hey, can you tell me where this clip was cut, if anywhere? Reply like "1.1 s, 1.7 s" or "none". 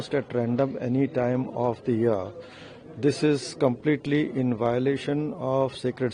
none